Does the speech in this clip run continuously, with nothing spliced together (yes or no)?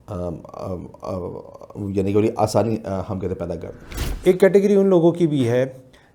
no